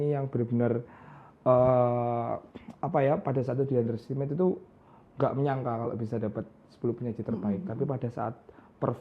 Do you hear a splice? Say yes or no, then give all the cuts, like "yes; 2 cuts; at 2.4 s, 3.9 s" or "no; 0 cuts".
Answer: no; 0 cuts